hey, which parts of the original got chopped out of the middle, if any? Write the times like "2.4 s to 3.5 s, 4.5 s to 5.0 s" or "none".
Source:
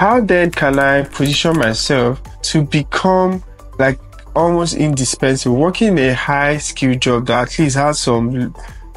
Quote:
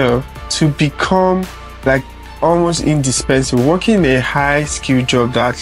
none